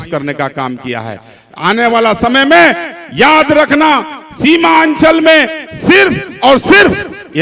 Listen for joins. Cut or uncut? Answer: uncut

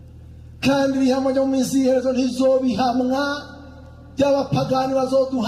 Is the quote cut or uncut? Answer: uncut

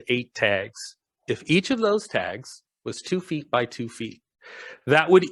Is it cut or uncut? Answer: uncut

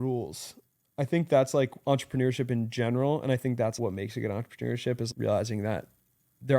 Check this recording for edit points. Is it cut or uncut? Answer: cut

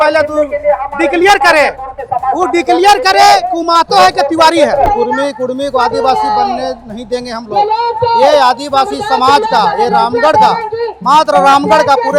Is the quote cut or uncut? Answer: cut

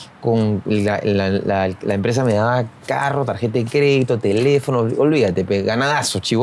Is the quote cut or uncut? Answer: uncut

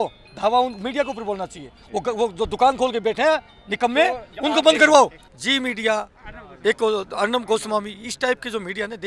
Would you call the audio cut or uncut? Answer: cut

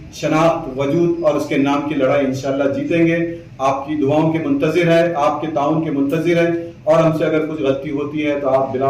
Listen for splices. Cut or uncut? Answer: uncut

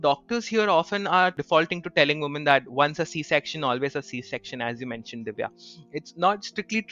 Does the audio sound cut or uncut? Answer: cut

